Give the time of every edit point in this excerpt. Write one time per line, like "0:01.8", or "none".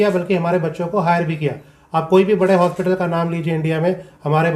none